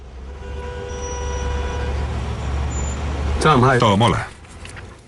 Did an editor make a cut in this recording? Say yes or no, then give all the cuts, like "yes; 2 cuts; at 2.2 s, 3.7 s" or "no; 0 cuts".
no; 0 cuts